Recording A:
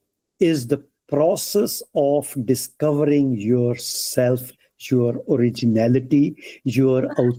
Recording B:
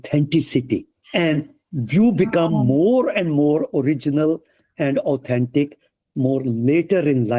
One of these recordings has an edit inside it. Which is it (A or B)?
B